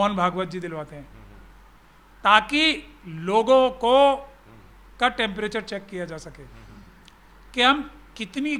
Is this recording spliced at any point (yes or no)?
no